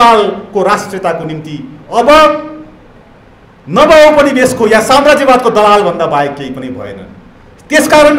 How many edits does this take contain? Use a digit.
0